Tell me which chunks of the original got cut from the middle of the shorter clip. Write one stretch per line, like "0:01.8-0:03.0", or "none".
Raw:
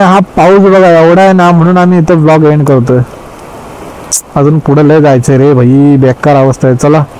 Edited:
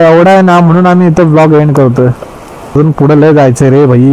0:03.7-0:04.4

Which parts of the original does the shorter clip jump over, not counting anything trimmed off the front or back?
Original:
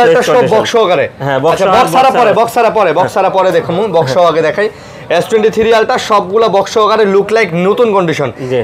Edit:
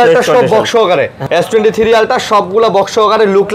0:01.2-0:04.9

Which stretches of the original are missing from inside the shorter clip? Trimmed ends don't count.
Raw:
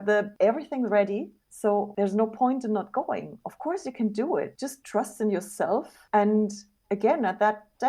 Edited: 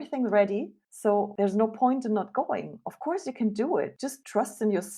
none

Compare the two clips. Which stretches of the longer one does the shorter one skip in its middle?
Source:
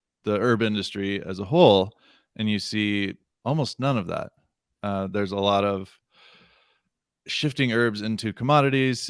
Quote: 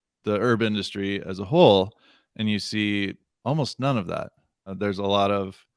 0:04.7-0:05.1

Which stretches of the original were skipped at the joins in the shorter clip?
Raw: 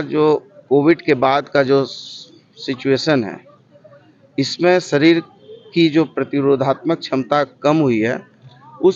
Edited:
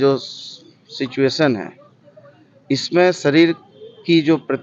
none

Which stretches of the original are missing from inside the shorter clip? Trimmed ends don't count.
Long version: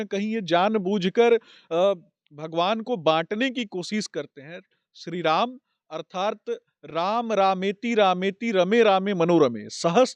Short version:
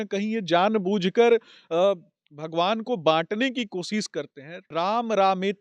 0:04.6-0:06.8

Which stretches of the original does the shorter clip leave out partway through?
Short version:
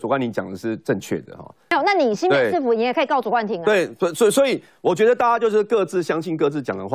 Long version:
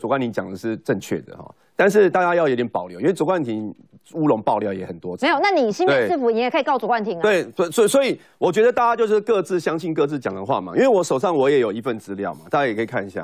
0:01.7-0:05.3

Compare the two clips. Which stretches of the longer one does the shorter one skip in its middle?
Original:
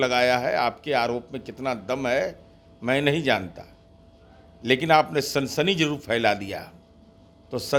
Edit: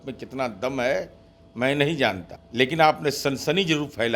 0:03.6-0:04.4

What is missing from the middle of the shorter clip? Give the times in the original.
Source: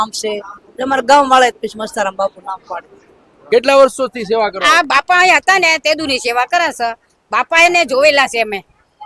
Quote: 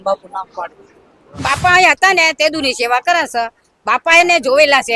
0:03.5-0:04.8

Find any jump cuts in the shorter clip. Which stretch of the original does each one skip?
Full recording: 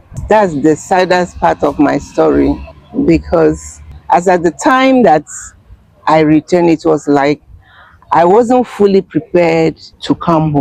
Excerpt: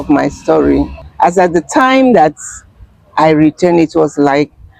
0:02.7-0:03.9

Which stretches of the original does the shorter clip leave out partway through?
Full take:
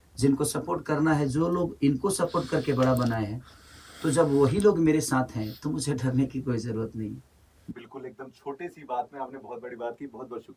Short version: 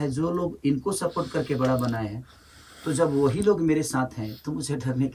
none

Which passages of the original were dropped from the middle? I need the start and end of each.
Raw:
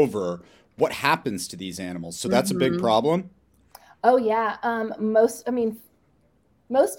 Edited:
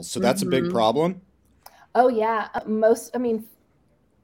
0:04.7-0:04.9

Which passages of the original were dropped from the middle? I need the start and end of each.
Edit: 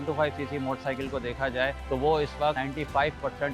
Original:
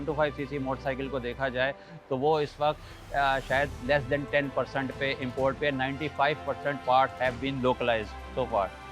0:01.8-0:02.0
0:02.8-0:05.9

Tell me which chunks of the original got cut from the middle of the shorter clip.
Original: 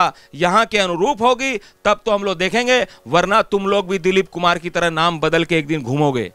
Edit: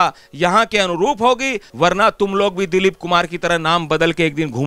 0:01.7-0:03.0

